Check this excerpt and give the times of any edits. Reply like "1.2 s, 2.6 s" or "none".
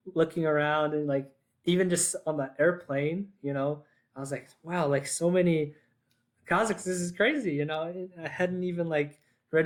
none